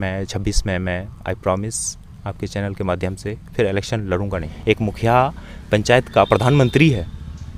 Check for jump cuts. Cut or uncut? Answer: cut